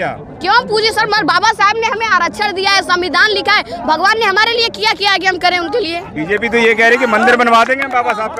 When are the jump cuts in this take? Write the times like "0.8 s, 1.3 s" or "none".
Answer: none